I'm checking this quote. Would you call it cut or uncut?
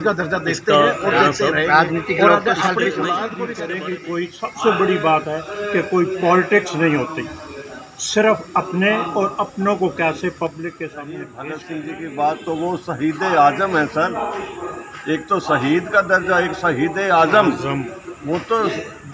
cut